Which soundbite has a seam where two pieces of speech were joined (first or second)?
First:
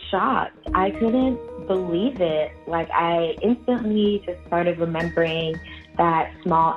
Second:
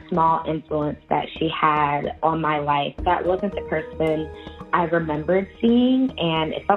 second